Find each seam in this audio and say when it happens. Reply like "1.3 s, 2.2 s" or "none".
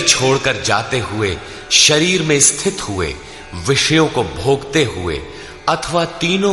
none